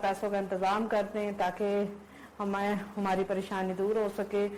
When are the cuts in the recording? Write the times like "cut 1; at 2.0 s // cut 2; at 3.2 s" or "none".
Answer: none